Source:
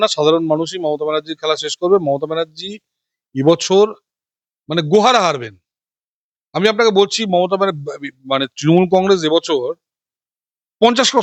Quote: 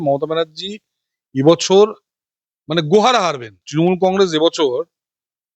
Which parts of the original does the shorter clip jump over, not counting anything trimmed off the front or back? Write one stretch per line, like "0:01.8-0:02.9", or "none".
0:05.6-0:08.5